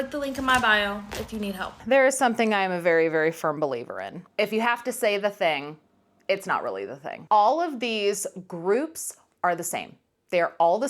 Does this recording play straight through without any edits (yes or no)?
no